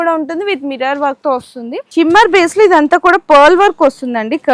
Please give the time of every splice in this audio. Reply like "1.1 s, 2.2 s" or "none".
1.8 s